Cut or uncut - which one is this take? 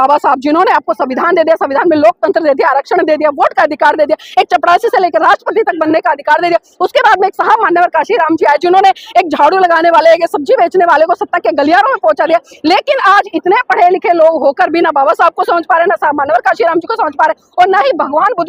uncut